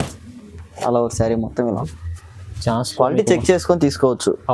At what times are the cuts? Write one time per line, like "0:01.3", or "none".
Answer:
0:01.9